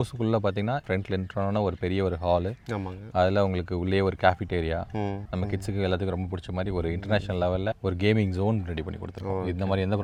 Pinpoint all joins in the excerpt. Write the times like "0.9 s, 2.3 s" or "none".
none